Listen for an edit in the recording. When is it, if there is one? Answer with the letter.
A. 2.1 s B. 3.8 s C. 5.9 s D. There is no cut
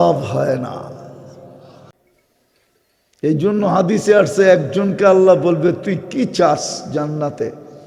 A